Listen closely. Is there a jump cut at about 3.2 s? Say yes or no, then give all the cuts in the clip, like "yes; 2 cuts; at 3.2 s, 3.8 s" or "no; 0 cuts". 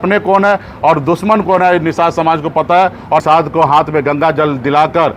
yes; 1 cut; at 3.2 s